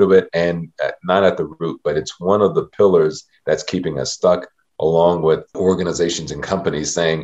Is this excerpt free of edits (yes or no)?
no